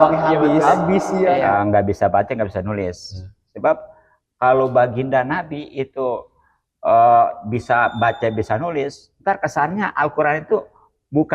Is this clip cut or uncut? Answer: cut